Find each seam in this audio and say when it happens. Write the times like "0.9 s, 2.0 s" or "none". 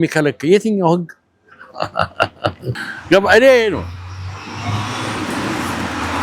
none